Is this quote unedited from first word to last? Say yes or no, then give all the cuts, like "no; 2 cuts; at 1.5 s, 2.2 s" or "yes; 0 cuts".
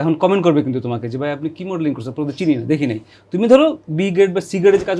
yes; 0 cuts